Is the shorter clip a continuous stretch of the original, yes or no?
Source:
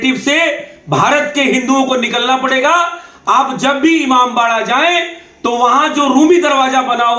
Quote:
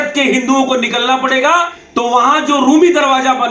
no